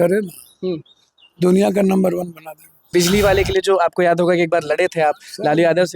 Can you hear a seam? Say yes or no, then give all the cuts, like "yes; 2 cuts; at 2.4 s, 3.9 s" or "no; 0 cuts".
yes; 1 cut; at 2.9 s